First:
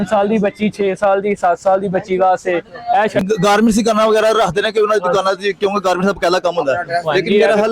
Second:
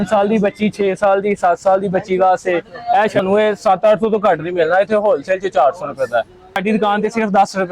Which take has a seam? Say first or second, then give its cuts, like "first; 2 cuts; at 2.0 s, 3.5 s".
second; 2 cuts; at 3.2 s, 6.6 s